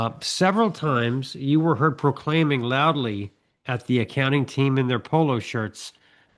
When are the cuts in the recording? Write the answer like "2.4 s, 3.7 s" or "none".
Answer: none

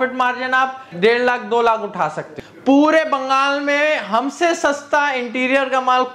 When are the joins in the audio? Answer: 0.9 s, 2.3 s

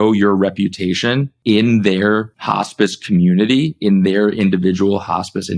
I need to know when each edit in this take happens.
1.3 s, 2.4 s

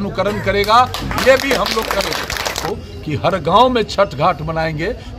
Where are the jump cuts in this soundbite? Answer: 2.6 s

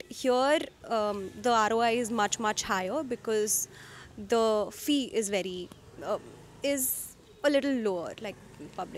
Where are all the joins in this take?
none

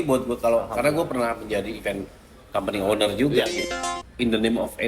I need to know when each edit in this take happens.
3.6 s

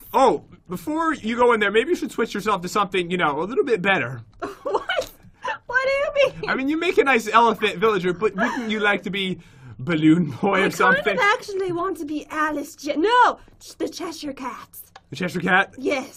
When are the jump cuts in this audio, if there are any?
none

